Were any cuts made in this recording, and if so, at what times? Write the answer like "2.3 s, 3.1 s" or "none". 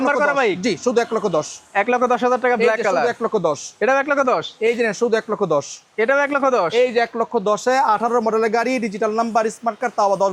none